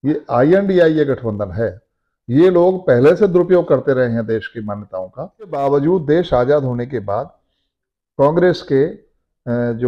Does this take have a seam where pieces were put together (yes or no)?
yes